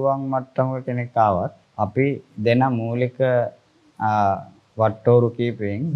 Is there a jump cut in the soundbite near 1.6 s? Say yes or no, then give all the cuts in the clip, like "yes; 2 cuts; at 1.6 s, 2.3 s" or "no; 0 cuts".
yes; 1 cut; at 1.6 s